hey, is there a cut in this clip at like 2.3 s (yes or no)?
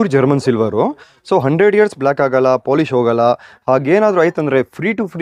no